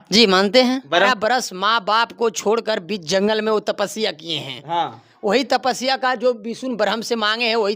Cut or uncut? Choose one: cut